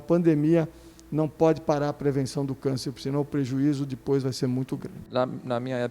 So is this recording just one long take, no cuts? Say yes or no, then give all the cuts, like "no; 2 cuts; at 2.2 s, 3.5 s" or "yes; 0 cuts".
no; 1 cut; at 5.0 s